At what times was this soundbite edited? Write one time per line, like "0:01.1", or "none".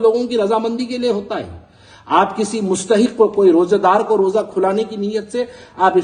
none